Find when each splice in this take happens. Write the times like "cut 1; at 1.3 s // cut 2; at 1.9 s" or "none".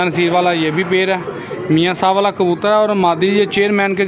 none